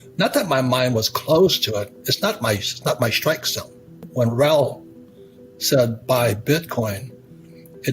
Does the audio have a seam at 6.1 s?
no; 1 cut; at 4.0 s

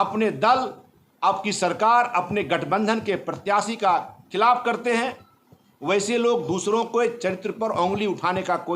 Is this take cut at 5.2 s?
yes; 1 cut; at 5.2 s

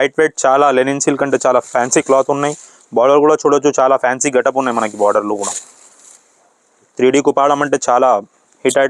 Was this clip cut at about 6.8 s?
yes; 1 cut; at 6.8 s

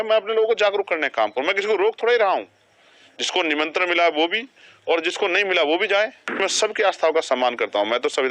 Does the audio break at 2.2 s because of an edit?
no; 1 cut; at 6.4 s

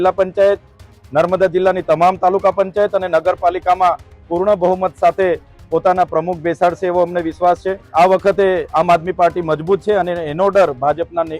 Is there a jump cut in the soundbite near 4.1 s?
no; 1 cut; at 7.8 s

